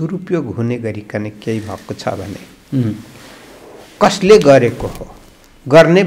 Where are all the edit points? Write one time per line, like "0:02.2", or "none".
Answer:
none